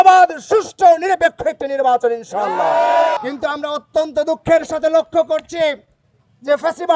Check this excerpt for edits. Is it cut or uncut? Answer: cut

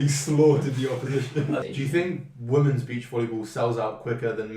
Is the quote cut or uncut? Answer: cut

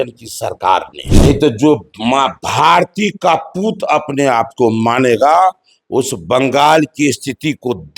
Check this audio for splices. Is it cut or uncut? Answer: cut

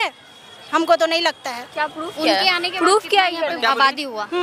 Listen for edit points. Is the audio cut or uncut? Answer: uncut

